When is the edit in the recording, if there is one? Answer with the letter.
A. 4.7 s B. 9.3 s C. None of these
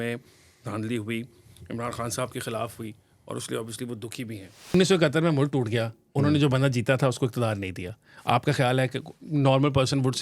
A